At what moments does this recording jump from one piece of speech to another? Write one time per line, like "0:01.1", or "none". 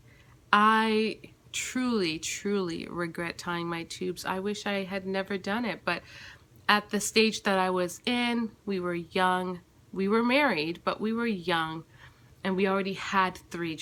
none